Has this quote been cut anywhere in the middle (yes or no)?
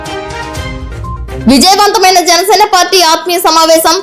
yes